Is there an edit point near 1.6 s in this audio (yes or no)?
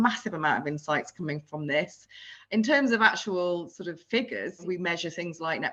no